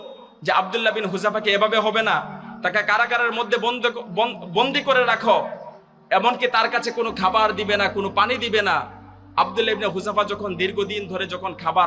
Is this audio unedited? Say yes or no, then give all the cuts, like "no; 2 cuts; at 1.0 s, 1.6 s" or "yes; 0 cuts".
yes; 0 cuts